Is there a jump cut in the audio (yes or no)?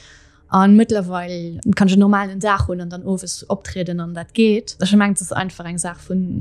yes